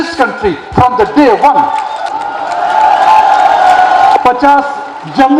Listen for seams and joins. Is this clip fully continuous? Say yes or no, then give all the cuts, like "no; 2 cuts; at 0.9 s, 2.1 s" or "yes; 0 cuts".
no; 2 cuts; at 2.1 s, 4.2 s